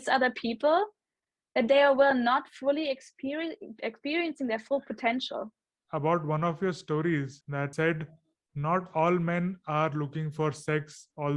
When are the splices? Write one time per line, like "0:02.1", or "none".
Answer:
0:05.8
0:07.7